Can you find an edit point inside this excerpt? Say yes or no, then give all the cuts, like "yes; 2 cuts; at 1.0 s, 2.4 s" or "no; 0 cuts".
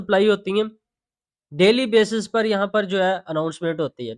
no; 0 cuts